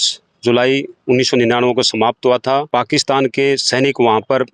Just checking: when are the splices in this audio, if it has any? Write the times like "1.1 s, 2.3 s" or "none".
2.7 s